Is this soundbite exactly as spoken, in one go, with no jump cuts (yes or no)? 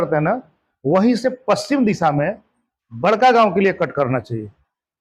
yes